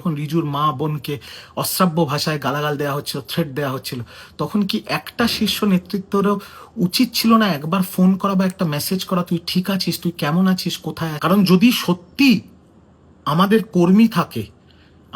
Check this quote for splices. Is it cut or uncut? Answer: cut